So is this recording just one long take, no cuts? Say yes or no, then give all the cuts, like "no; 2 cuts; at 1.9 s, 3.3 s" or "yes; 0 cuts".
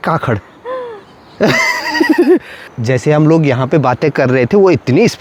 yes; 0 cuts